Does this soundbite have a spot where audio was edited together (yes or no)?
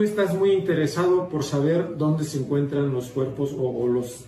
no